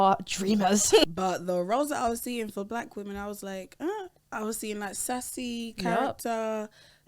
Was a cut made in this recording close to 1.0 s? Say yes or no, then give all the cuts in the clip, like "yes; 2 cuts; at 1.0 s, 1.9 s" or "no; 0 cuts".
yes; 1 cut; at 1.0 s